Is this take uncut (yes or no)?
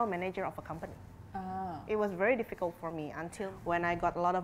no